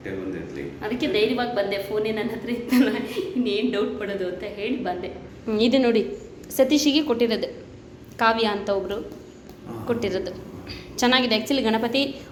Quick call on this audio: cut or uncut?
uncut